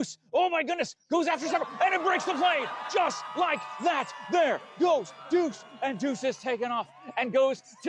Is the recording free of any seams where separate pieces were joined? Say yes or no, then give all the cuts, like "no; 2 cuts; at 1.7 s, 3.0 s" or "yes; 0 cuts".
yes; 0 cuts